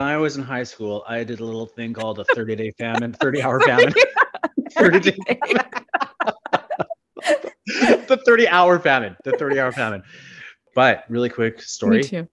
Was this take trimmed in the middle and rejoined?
yes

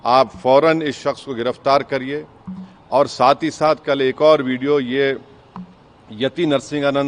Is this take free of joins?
yes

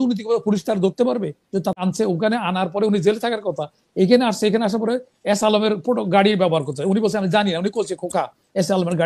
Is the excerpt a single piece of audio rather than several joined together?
no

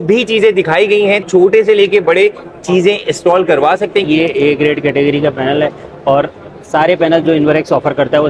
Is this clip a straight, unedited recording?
no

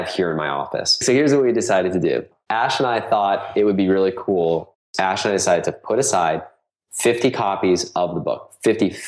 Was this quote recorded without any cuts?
no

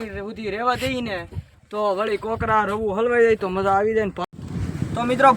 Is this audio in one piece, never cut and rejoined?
no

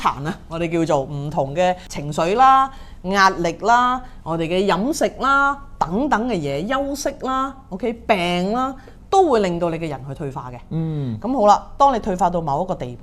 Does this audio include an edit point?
yes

